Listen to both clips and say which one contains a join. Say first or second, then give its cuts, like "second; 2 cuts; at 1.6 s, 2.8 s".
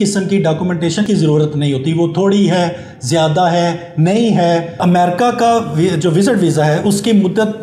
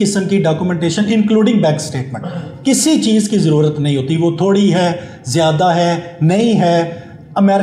first; 2 cuts; at 1.1 s, 4.7 s